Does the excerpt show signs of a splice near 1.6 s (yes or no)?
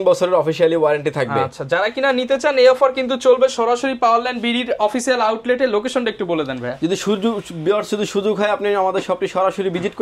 no